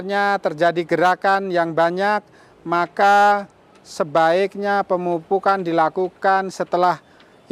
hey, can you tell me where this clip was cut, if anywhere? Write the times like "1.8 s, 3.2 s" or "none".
none